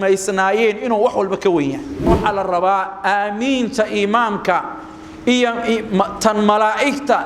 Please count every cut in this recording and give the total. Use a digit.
1